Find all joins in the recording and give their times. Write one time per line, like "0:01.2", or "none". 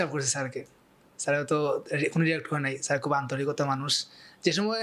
none